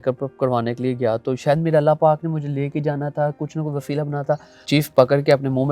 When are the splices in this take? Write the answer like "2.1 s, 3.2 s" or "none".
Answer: 4.5 s